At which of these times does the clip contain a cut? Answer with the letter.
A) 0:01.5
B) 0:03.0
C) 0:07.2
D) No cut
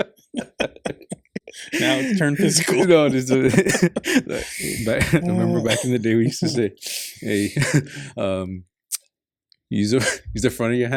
D